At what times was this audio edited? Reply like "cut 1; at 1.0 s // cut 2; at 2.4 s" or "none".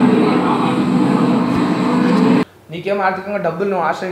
cut 1; at 2.4 s